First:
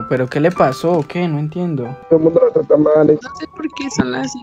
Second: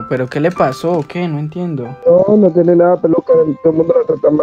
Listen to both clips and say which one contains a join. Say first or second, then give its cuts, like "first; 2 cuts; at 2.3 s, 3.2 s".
first; 2 cuts; at 2.0 s, 3.2 s